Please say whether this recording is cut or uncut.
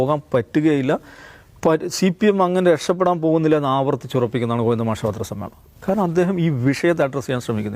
uncut